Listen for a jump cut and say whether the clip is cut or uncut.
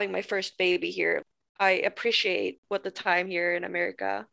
cut